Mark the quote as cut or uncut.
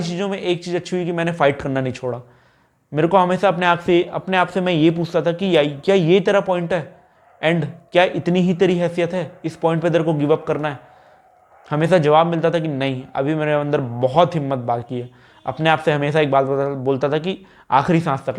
uncut